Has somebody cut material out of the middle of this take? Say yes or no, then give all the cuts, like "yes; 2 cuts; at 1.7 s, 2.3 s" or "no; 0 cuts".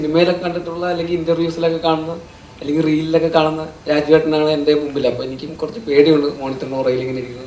no; 0 cuts